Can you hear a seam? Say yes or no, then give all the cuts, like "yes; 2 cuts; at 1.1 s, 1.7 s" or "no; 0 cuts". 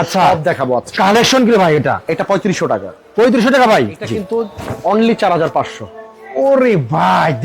yes; 2 cuts; at 0.9 s, 4.1 s